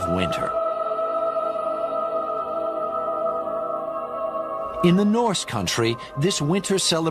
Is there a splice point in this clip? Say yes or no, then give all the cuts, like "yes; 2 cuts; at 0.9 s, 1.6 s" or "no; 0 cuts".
no; 0 cuts